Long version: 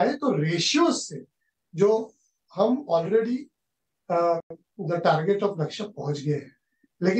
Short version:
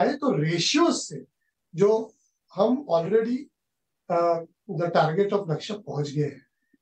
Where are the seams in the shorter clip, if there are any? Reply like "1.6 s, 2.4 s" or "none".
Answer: 4.6 s